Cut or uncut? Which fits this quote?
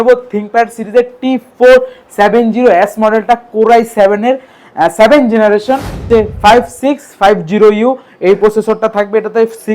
cut